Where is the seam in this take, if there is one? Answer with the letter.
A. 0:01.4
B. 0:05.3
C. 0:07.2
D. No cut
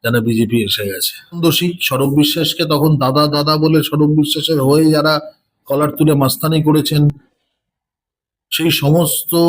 A